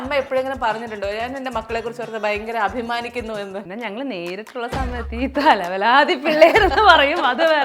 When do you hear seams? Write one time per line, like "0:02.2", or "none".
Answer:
0:03.7